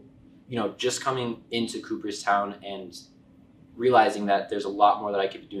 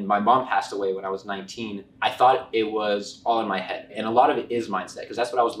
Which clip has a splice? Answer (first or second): second